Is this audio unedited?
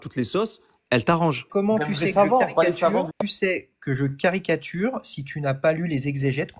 no; 1 cut; at 1.4 s

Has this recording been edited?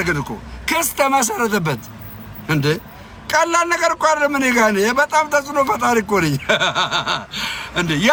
no; 0 cuts

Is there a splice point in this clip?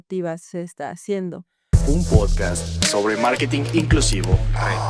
yes; 1 cut; at 1.5 s

